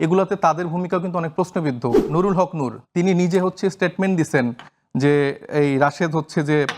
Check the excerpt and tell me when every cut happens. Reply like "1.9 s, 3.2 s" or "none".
2.0 s